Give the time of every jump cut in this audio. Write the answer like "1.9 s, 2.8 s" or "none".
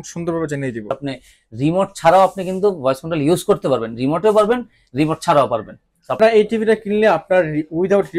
1.0 s, 6.2 s